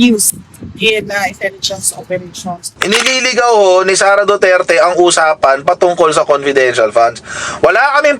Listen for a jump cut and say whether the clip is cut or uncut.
cut